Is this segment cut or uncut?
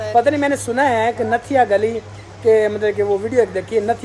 uncut